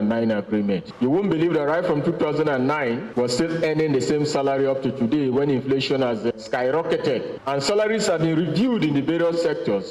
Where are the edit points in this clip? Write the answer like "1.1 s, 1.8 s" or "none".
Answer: none